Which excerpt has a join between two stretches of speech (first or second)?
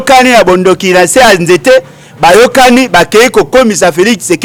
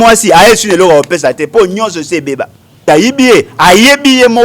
second